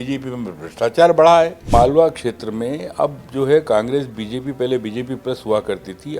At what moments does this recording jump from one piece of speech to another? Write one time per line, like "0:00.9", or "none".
0:01.7